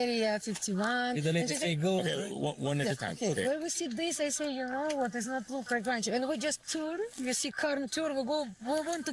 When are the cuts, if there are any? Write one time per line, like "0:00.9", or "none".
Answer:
none